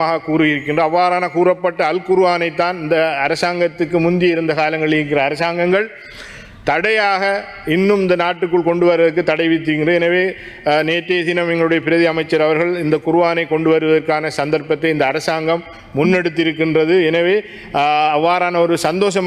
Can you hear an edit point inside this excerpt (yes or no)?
no